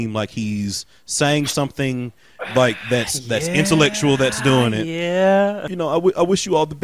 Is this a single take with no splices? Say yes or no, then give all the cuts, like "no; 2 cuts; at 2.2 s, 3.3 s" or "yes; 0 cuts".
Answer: no; 1 cut; at 5.6 s